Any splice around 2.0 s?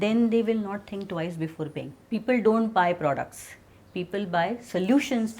yes; 1 cut; at 2.0 s

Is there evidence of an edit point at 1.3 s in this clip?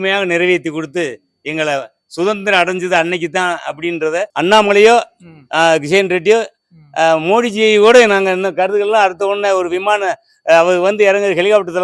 no; 1 cut; at 4.3 s

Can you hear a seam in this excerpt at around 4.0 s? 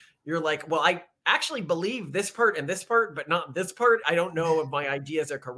yes; 1 cut; at 4.0 s

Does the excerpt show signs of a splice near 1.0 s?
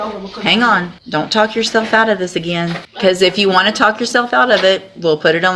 yes; 2 cuts; at 1.0 s, 2.8 s

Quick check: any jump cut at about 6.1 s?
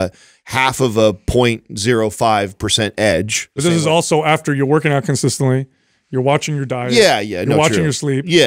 no; 1 cut; at 3.6 s

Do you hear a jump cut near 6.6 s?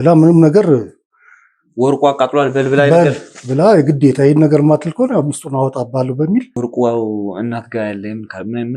yes; 1 cut; at 6.6 s

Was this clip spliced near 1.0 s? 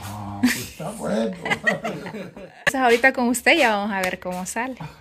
no; 1 cut; at 2.6 s

